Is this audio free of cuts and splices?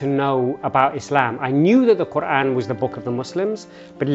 yes; 0 cuts

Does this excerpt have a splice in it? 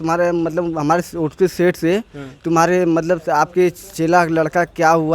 no; 0 cuts

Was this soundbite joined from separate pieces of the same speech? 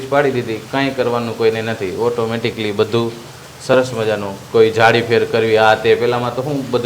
no; 0 cuts

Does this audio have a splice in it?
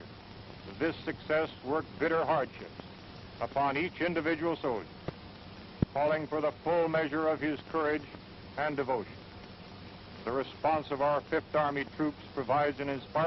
no; 0 cuts

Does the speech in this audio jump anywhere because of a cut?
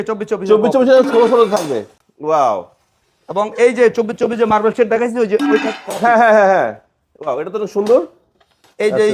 no; 0 cuts

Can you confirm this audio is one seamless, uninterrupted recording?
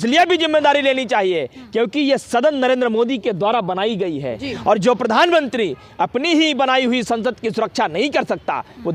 yes; 0 cuts

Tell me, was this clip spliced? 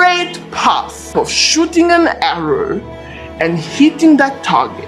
yes; 1 cut; at 1.1 s

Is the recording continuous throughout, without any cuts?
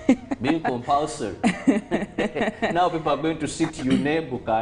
yes; 0 cuts

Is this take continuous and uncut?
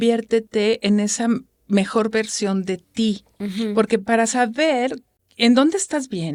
yes; 0 cuts

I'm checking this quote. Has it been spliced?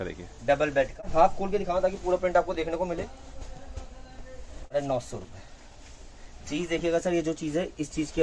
yes; 2 cuts; at 1.0 s, 4.7 s

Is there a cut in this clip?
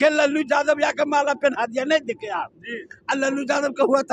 no; 0 cuts

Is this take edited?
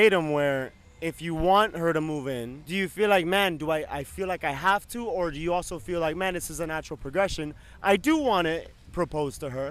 no; 0 cuts

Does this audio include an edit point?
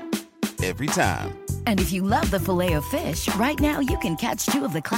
no; 0 cuts

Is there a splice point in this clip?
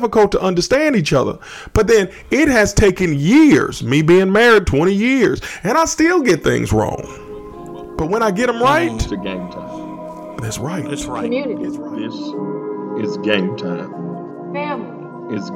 yes; 1 cut; at 9.1 s

